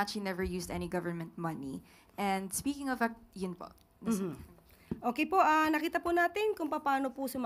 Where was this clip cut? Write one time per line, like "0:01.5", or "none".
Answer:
none